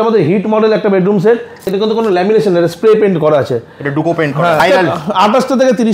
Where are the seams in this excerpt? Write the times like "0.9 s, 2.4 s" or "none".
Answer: 1.7 s, 4.6 s